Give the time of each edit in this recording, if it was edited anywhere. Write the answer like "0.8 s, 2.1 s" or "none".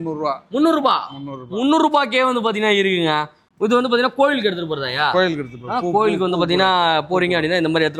none